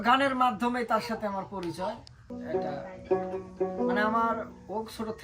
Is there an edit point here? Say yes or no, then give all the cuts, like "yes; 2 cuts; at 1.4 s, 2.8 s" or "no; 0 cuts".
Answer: yes; 1 cut; at 2.3 s